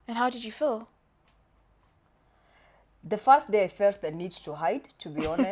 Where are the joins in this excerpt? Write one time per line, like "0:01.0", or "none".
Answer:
none